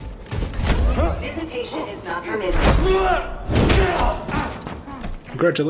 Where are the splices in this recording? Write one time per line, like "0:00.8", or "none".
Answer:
none